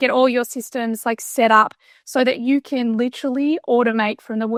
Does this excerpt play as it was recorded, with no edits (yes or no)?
yes